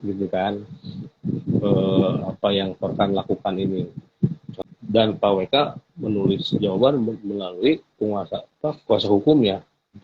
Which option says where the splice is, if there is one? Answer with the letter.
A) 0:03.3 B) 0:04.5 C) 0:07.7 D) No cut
B